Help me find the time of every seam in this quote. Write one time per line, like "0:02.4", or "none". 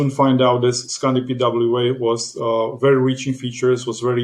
none